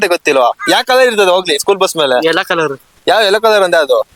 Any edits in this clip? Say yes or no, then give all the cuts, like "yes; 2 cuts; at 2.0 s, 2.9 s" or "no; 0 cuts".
no; 0 cuts